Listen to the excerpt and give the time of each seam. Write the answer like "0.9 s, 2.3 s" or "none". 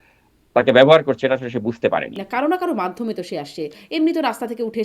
2.2 s

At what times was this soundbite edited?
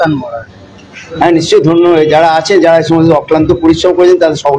1.0 s

